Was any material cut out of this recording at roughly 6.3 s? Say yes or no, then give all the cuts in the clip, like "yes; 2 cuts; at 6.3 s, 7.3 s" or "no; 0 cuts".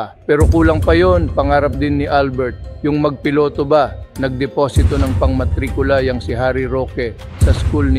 yes; 1 cut; at 6.3 s